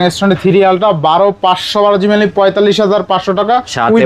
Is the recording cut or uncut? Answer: uncut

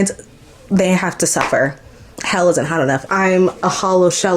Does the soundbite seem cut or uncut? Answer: cut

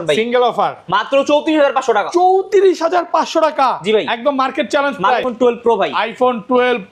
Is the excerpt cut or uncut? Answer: cut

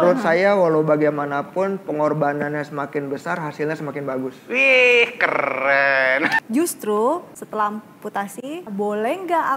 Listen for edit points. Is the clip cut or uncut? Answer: cut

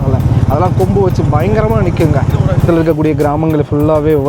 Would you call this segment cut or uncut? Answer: cut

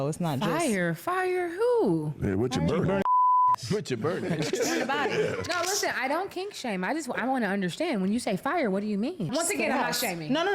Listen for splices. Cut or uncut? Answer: cut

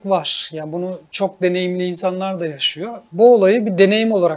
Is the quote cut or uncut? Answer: cut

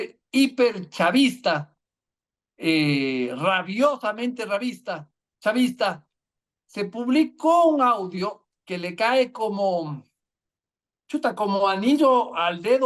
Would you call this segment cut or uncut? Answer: uncut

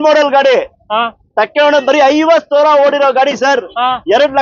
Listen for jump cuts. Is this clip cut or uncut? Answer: uncut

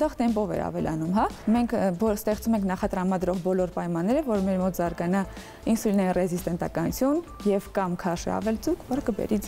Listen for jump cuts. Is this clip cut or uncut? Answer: cut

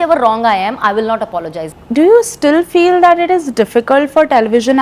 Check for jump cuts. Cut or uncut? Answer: cut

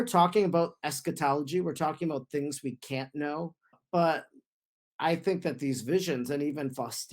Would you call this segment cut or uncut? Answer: cut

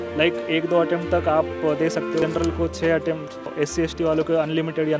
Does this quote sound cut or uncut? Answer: cut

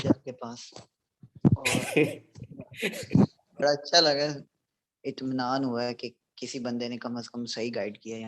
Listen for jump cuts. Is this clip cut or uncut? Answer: uncut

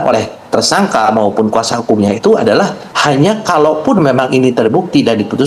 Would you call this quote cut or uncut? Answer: cut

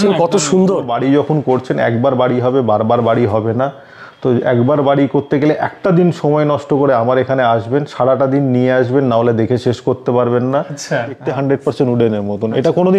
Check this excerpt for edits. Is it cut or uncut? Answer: cut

